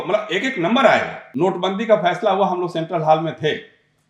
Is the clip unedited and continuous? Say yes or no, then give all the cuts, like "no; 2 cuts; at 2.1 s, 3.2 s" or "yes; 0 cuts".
no; 1 cut; at 1.2 s